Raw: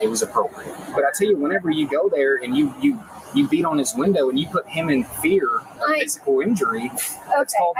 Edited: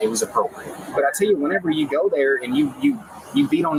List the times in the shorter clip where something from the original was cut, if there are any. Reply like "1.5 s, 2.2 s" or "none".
none